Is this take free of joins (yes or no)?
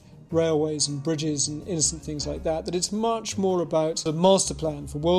no